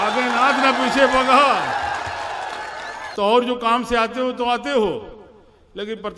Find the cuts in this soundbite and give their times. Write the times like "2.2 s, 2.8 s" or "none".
3.0 s